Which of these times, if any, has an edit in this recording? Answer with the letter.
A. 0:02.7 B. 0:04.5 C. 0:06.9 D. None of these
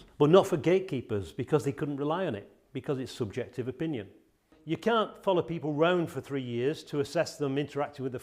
B